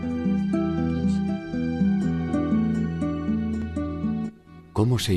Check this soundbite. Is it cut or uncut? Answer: uncut